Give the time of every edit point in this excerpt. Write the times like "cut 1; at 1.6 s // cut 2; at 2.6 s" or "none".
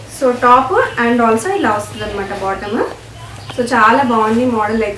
none